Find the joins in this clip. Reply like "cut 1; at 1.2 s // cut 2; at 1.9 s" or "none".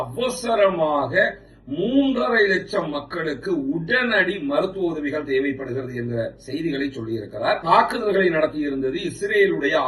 cut 1; at 7.6 s